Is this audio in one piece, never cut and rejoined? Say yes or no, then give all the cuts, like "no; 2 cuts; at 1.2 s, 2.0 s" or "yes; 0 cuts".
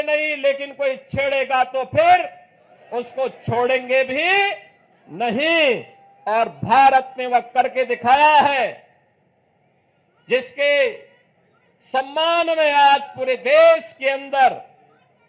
yes; 0 cuts